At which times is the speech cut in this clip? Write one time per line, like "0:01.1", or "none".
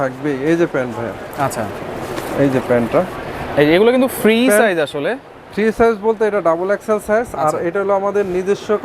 none